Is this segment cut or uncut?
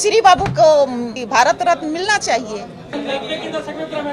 cut